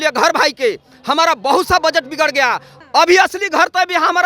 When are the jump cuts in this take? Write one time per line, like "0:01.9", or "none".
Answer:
0:02.7